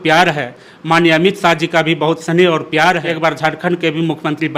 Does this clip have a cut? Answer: yes; 1 cut; at 3.1 s

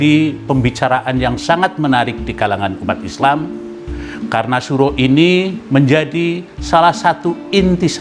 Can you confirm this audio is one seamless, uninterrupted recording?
no; 1 cut; at 5.6 s

